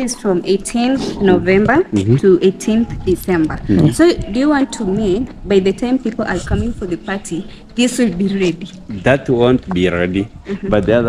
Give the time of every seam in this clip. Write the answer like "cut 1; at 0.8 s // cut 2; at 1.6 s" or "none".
none